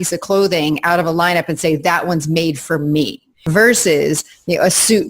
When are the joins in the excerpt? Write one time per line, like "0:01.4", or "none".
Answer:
0:03.5